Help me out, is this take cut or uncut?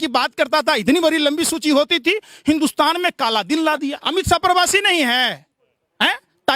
cut